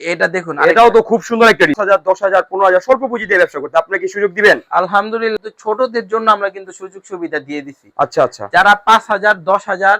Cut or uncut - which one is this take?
cut